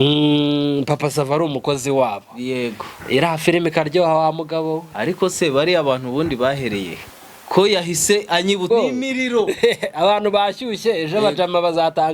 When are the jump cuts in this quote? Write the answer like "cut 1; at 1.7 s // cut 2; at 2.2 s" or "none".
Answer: cut 1; at 8.7 s